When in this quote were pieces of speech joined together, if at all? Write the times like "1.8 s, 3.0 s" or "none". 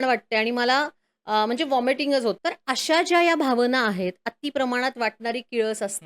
2.4 s

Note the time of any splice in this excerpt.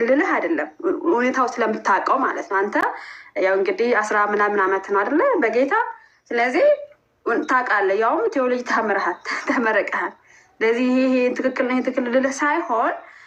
none

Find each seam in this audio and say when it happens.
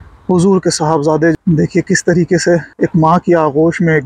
1.3 s, 2.7 s

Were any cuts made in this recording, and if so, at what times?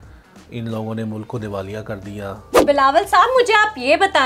2.6 s

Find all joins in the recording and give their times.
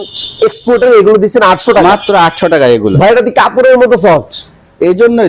2.9 s

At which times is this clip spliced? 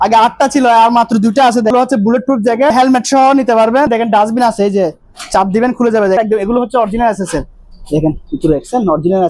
1.7 s, 2.7 s, 3.9 s, 6.2 s

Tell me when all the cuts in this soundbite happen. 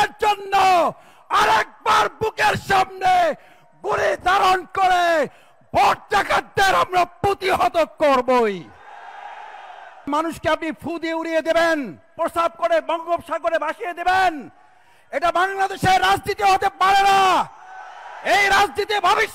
10.1 s, 12.1 s

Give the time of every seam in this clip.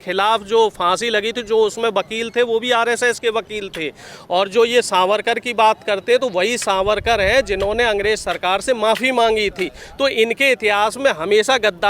none

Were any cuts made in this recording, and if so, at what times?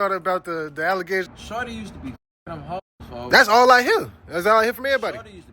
1.3 s

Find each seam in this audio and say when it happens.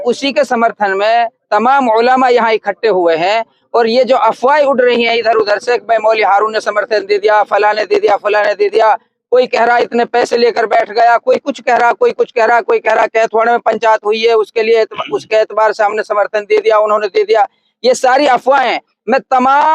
none

